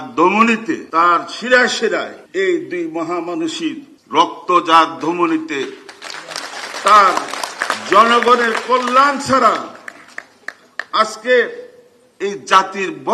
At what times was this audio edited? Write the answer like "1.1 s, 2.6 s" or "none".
0.8 s, 2.2 s, 3.9 s